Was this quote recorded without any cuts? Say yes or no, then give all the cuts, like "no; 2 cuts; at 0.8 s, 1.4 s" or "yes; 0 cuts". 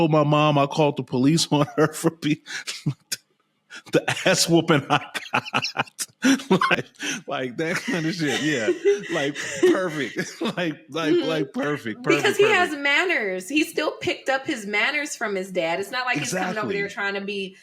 no; 1 cut; at 6.7 s